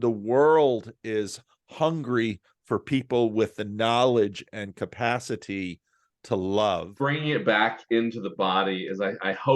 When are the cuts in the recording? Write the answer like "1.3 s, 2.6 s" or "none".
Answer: 6.9 s